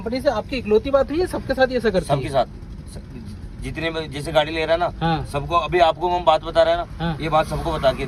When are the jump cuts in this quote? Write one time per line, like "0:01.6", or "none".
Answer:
none